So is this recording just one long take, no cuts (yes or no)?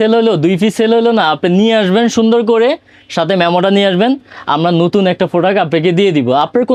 yes